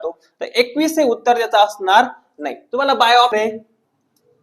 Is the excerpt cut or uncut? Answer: cut